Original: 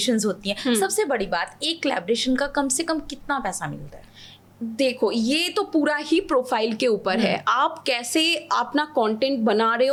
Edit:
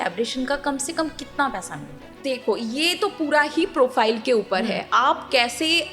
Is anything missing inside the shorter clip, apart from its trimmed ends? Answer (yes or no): yes